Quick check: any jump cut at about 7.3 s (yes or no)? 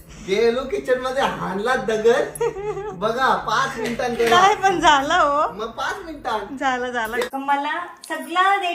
yes